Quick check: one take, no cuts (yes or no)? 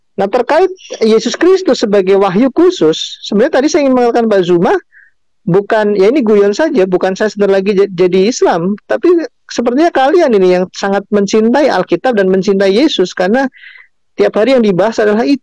yes